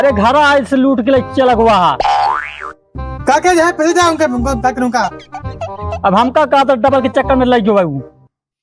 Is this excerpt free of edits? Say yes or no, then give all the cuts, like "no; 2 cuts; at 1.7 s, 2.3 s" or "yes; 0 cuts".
yes; 0 cuts